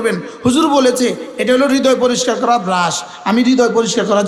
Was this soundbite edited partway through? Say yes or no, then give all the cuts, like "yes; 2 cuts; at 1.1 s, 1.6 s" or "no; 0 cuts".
no; 0 cuts